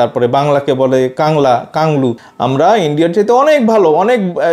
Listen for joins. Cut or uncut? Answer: cut